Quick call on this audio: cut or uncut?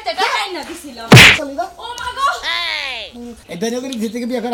cut